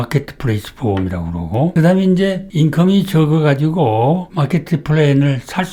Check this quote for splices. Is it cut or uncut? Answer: uncut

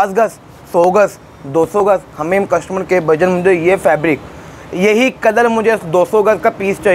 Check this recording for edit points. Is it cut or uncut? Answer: uncut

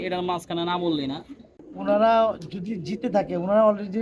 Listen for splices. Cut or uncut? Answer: cut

